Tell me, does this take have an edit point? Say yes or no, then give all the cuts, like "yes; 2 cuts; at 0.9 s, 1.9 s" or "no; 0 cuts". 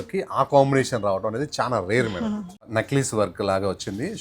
yes; 1 cut; at 2.7 s